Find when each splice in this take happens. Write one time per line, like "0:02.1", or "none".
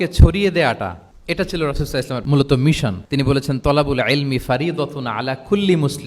0:01.1
0:02.2
0:03.0